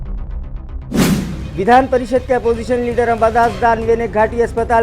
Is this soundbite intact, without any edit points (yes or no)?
no